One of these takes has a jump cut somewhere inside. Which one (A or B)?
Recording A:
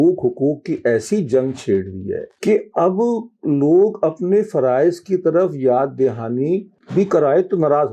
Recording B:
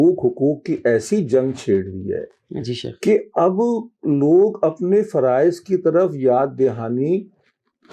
A